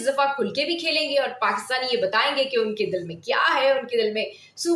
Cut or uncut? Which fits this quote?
uncut